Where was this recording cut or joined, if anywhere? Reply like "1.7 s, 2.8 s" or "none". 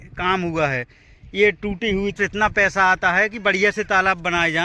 2.1 s